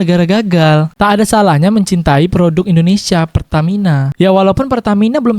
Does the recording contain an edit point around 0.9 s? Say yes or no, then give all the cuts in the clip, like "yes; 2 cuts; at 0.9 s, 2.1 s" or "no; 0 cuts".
yes; 1 cut; at 0.9 s